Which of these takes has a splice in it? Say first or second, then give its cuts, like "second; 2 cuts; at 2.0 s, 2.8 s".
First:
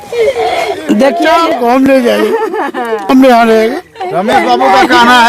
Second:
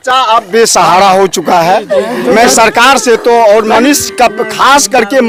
first; 1 cut; at 1.4 s